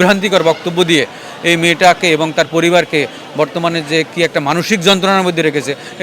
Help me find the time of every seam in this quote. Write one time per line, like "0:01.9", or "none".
none

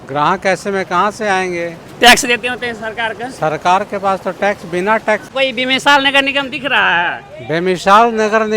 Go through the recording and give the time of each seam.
0:05.3

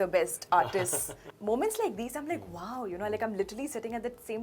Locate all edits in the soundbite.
0:01.2

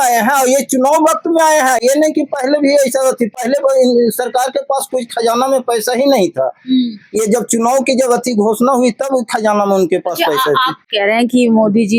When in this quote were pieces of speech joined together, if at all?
none

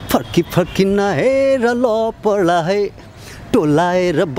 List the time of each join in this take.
none

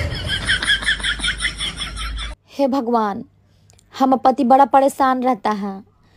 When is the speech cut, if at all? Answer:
0:02.2

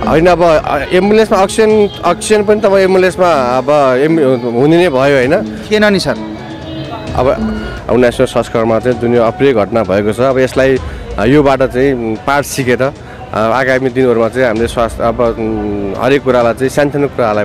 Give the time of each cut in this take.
0:07.7

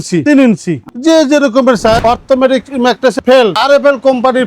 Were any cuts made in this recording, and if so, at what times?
0:02.0
0:03.2

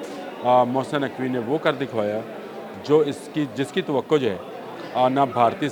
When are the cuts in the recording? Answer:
none

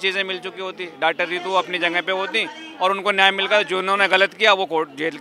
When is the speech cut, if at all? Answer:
none

